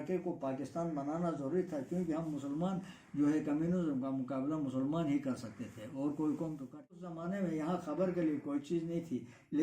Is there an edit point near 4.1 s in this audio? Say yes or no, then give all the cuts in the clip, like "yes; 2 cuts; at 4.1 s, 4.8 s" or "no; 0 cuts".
no; 1 cut; at 7.0 s